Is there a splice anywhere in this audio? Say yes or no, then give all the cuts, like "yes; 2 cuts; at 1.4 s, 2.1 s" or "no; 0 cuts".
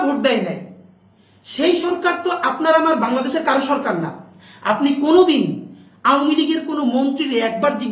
no; 0 cuts